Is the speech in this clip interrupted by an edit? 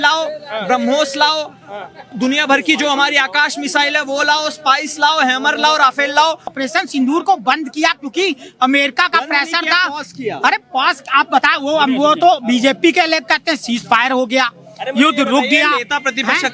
yes; 1 cut; at 6.5 s

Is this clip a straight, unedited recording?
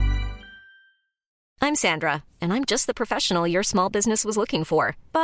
no; 1 cut; at 1.4 s

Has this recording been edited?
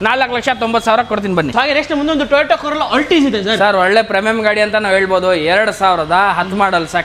no; 0 cuts

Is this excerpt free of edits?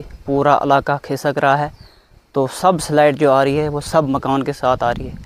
yes; 0 cuts

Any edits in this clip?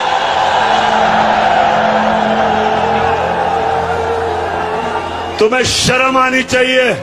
no; 0 cuts

